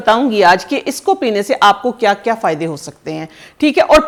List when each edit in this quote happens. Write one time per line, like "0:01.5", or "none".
none